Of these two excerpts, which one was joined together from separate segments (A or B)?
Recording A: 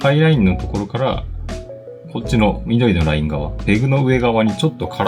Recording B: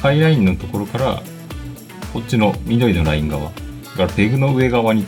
A